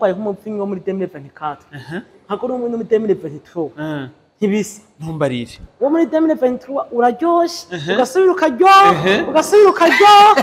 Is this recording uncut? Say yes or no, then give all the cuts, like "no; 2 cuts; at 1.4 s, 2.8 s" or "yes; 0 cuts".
yes; 0 cuts